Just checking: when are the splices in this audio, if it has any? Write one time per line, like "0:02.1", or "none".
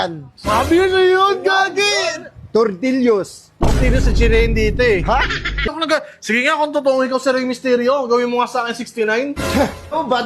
0:05.8

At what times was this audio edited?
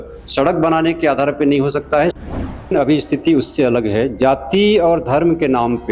0:02.7

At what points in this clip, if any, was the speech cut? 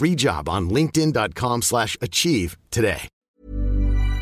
0:03.1

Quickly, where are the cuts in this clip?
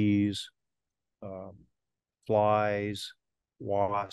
none

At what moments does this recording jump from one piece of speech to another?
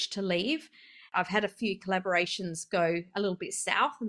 0:01.1

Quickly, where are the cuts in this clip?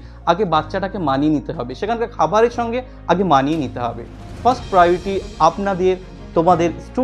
none

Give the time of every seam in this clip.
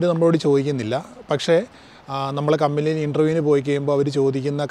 none

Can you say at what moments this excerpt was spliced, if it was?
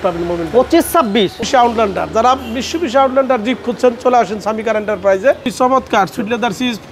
0:01.4
0:05.4

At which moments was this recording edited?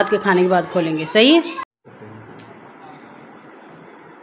0:01.6

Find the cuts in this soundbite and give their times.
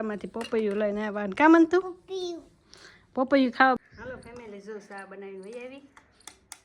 0:03.8

